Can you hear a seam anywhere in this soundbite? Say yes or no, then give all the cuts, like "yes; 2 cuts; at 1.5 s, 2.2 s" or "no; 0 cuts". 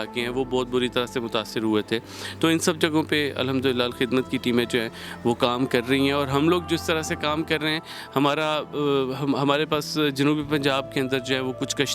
no; 0 cuts